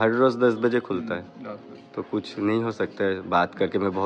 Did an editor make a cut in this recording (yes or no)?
no